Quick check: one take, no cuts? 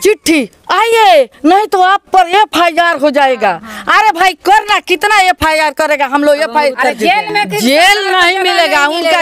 yes; 0 cuts

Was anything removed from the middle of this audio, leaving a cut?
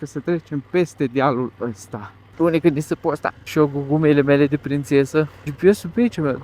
yes; 3 cuts; at 2.2 s, 3.4 s, 5.4 s

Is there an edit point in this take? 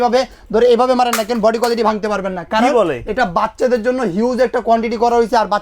no; 0 cuts

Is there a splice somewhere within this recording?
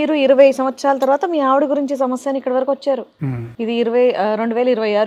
no; 0 cuts

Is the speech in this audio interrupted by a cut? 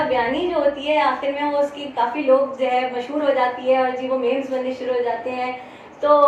no; 0 cuts

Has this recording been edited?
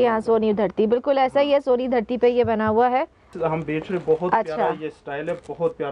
yes; 1 cut; at 3.3 s

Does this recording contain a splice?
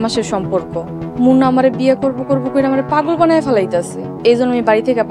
yes; 2 cuts; at 1.0 s, 4.0 s

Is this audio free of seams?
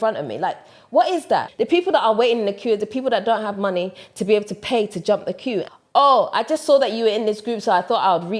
no; 2 cuts; at 1.5 s, 5.6 s

